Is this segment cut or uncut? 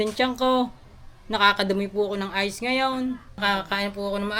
cut